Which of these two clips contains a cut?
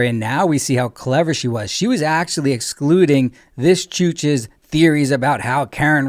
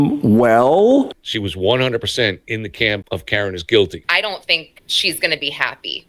second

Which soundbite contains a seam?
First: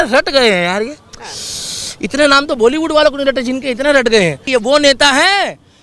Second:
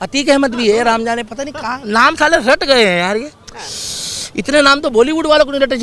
first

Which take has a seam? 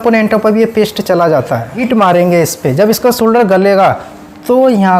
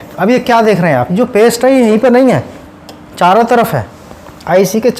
first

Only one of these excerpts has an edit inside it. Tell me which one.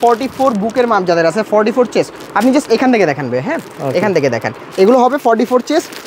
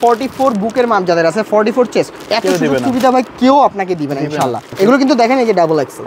second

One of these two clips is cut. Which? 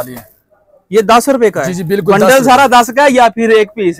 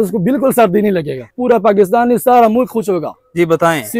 second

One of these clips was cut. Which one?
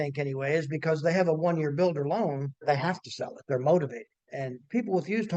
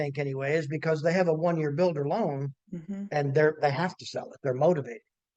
first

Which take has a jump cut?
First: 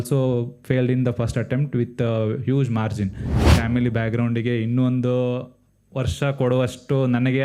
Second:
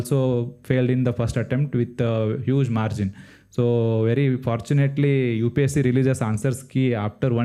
first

